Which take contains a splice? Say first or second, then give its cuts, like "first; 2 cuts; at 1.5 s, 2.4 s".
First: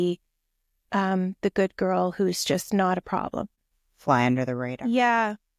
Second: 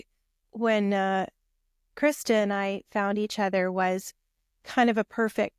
first; 1 cut; at 3.6 s